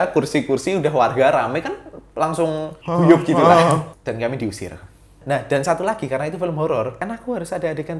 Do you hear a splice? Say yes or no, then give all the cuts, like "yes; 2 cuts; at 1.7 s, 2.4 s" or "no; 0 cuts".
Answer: yes; 4 cuts; at 2.7 s, 3.9 s, 5.2 s, 7.0 s